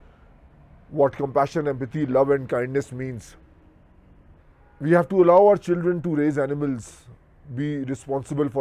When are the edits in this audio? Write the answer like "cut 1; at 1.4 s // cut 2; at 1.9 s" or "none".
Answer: cut 1; at 4.4 s